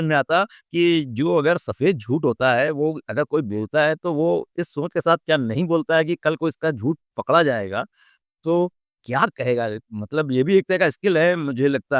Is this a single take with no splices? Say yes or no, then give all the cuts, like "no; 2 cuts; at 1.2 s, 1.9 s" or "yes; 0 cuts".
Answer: yes; 0 cuts